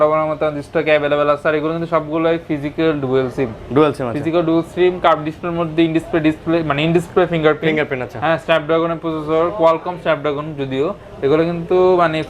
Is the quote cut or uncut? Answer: uncut